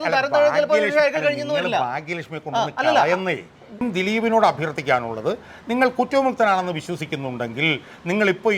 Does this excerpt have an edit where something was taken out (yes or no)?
yes